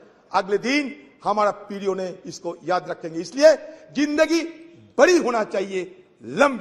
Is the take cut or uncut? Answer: uncut